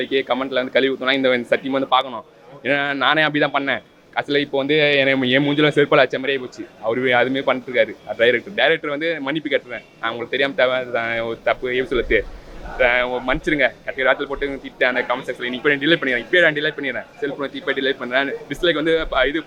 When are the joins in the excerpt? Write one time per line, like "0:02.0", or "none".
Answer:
none